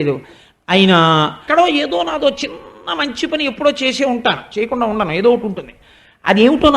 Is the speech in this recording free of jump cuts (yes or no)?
no